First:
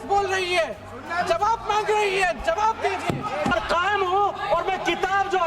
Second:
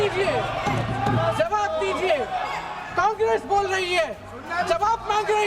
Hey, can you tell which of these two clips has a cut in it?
first; 1 cut; at 3.5 s

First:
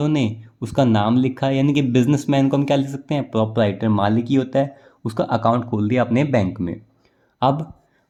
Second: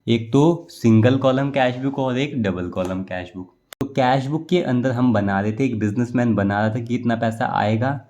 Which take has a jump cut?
second; 1 cut; at 3.8 s

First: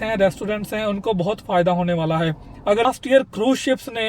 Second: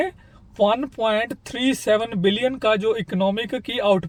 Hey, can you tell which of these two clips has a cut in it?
first; 1 cut; at 2.9 s

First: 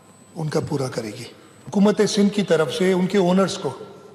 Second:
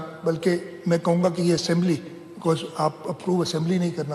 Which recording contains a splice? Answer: first; 1 cut; at 1.7 s

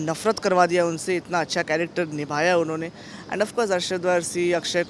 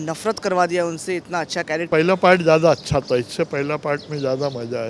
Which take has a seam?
second; 1 cut; at 1.8 s

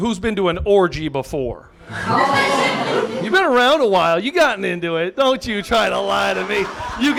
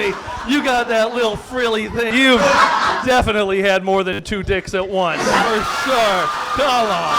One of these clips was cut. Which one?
second; 1 cut; at 2.1 s

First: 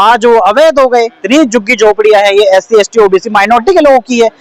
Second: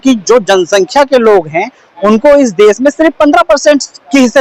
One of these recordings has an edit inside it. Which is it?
first; 1 cut; at 1.2 s

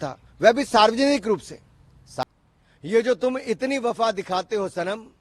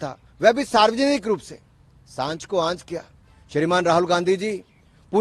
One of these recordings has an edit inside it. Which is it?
first; 1 cut; at 2.2 s

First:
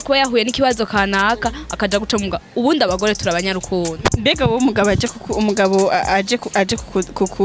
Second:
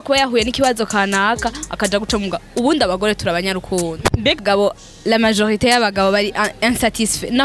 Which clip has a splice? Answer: second; 1 cut; at 4.4 s

